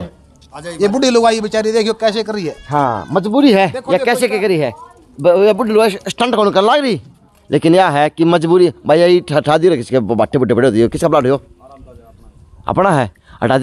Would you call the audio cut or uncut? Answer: uncut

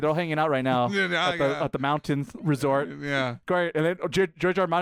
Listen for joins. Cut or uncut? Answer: uncut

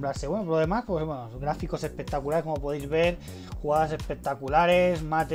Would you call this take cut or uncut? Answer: uncut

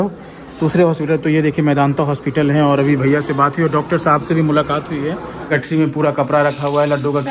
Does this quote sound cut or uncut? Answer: cut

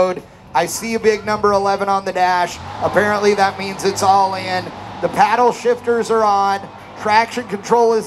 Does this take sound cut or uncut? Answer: uncut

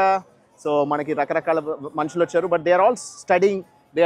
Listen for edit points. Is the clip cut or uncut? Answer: uncut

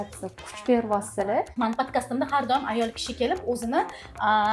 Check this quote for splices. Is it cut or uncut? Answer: cut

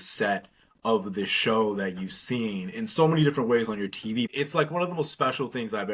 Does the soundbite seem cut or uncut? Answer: cut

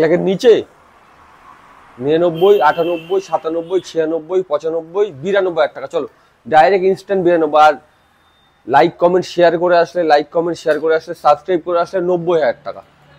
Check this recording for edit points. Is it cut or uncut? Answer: uncut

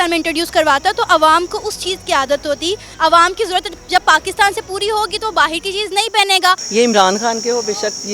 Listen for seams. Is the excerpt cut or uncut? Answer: cut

